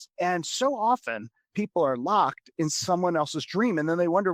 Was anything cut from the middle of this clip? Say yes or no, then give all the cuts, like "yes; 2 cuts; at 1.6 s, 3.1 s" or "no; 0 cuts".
no; 0 cuts